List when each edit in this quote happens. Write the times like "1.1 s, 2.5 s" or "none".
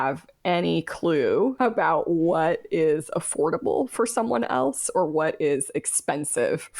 1.6 s